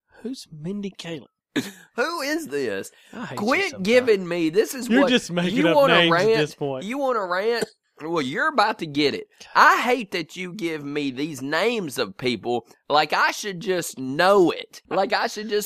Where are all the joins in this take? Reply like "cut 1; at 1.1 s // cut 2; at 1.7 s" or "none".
cut 1; at 14.7 s